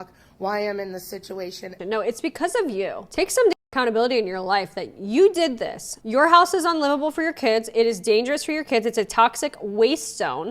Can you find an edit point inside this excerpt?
yes; 2 cuts; at 1.8 s, 5.9 s

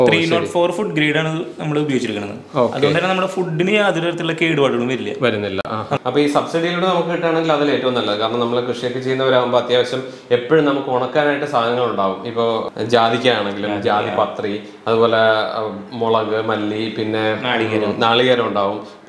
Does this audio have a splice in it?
yes; 2 cuts; at 5.9 s, 12.7 s

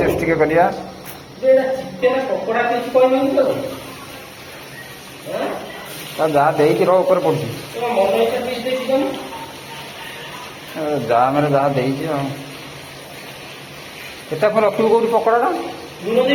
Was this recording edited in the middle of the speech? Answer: no; 0 cuts

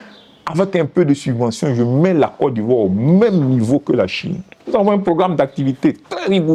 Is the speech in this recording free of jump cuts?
yes; 0 cuts

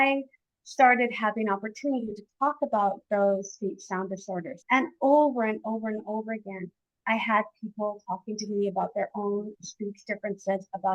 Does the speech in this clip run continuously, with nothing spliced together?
no; 1 cut; at 4.5 s

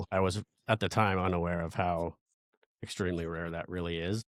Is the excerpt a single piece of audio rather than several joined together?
yes; 0 cuts

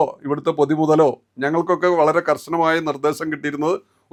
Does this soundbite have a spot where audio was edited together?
no; 0 cuts

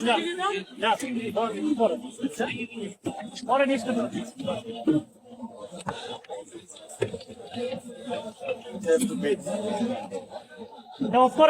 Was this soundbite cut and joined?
yes; 1 cut; at 2.1 s

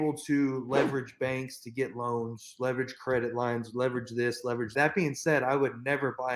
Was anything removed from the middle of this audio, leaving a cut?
no; 0 cuts

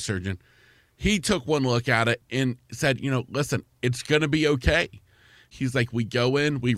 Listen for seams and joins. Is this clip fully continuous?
no; 2 cuts; at 2.2 s, 5.5 s

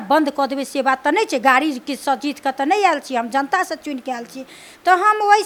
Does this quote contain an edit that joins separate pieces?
no; 0 cuts

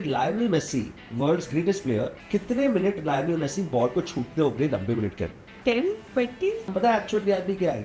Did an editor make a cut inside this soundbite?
yes; 3 cuts; at 2.2 s, 5.4 s, 6.7 s

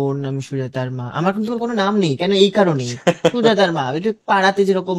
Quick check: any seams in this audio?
no; 0 cuts

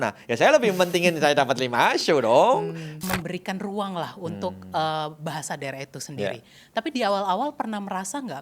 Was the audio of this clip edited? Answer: yes; 1 cut; at 3.0 s

